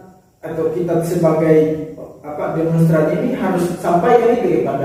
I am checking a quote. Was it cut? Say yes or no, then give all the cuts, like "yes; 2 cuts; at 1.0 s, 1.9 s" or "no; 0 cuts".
no; 0 cuts